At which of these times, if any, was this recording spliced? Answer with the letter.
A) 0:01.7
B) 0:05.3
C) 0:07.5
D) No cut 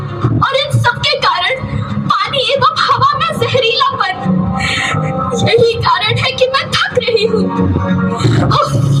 D